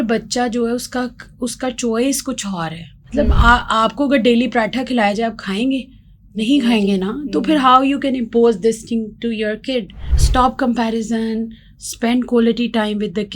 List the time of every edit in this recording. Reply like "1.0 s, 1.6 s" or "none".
10.1 s